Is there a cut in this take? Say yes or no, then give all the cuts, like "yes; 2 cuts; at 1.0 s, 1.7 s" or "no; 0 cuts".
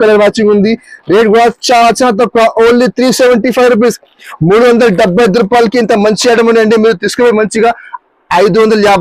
no; 0 cuts